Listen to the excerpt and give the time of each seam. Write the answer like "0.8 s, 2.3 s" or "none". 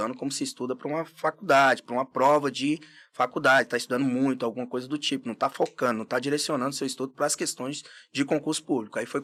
none